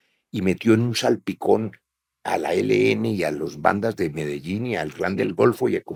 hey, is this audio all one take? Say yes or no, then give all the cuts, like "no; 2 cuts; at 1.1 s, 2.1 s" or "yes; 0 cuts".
yes; 0 cuts